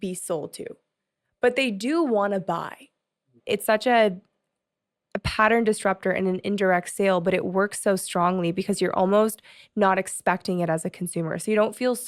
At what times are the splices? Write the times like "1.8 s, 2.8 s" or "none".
3.4 s